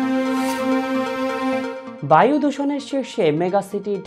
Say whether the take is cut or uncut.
cut